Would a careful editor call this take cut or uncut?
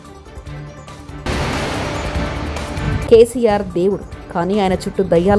cut